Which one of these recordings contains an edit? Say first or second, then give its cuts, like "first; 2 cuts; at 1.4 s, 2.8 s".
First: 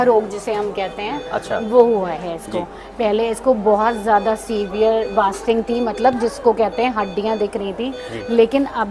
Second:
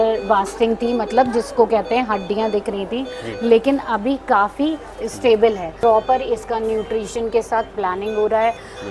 second; 1 cut; at 5.7 s